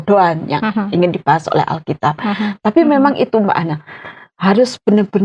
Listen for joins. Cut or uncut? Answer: cut